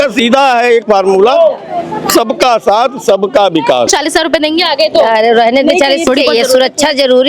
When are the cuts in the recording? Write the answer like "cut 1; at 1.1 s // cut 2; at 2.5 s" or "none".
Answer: cut 1; at 3.9 s // cut 2; at 6.1 s